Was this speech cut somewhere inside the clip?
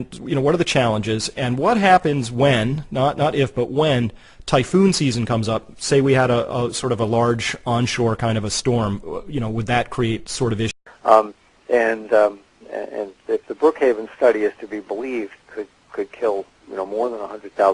no; 0 cuts

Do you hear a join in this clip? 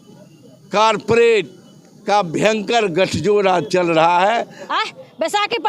yes; 1 cut; at 4.6 s

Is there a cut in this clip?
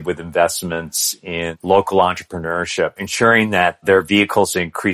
yes; 2 cuts; at 1.5 s, 3.0 s

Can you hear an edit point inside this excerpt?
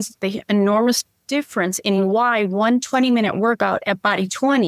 no; 0 cuts

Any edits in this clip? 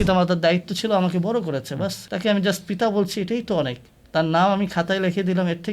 yes; 1 cut; at 2.0 s

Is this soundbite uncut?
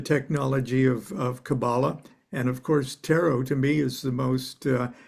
yes; 0 cuts

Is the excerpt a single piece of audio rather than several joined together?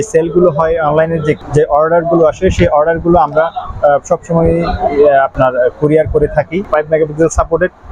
yes; 0 cuts

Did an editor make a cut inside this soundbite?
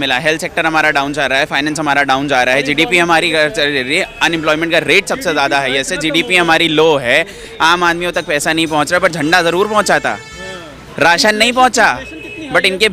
no; 0 cuts

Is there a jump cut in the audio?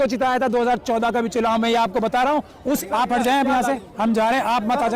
yes; 1 cut; at 2.8 s

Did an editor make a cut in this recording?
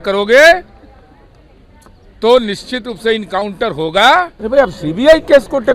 yes; 1 cut; at 4.4 s

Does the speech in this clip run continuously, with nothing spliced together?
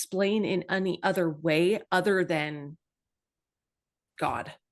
yes; 0 cuts

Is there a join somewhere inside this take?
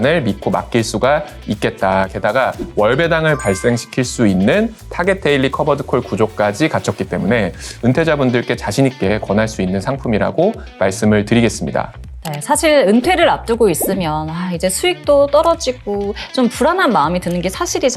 no; 0 cuts

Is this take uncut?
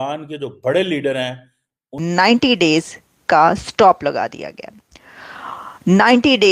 no; 1 cut; at 1.9 s

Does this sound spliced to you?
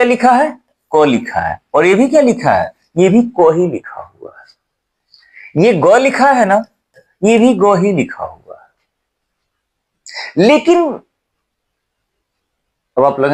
no; 0 cuts

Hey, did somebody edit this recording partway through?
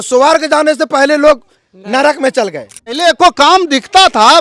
yes; 1 cut; at 3.0 s

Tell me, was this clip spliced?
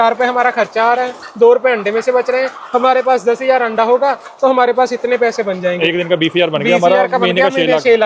no; 0 cuts

